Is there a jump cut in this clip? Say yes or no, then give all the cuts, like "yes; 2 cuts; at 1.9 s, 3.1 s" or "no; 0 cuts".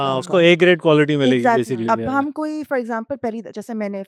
no; 0 cuts